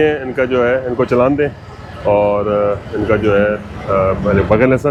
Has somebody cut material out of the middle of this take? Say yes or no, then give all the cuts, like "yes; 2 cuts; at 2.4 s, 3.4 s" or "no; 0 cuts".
no; 0 cuts